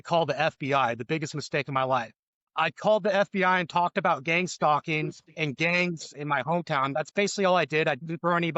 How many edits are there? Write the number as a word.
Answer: one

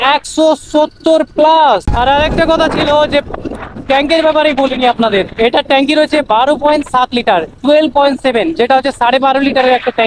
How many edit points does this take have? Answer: one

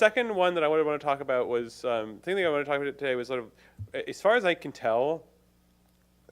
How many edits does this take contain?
one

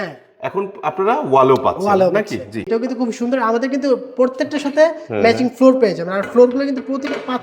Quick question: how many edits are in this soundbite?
one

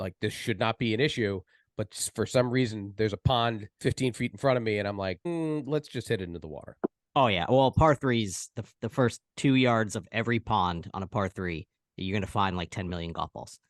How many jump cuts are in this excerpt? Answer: three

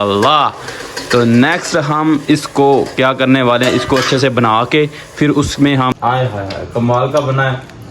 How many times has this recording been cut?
one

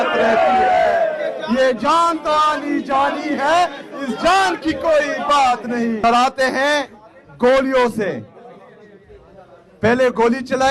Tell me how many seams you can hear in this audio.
one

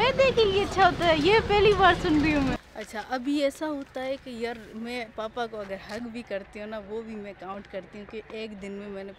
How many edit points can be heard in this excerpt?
one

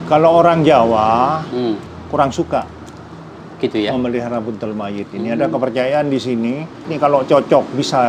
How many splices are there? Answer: two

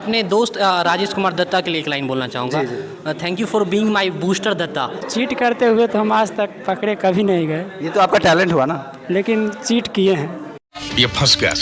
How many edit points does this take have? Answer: one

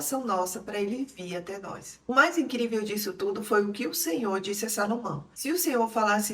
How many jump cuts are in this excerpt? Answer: one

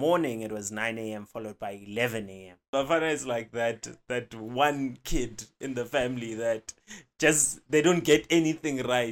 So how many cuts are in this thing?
one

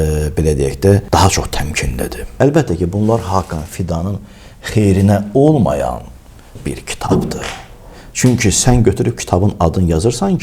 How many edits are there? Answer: two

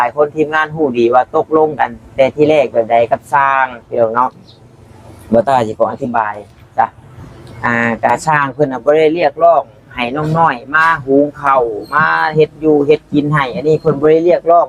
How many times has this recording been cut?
zero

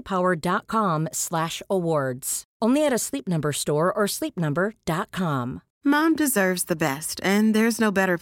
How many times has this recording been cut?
one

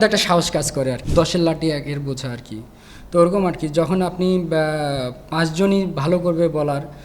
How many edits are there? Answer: one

